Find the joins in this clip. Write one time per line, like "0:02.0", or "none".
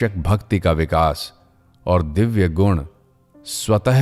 none